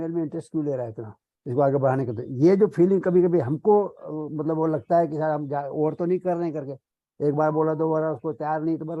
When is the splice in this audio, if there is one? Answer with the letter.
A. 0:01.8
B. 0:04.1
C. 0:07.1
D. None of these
D